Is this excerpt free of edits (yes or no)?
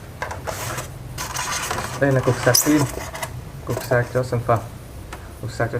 no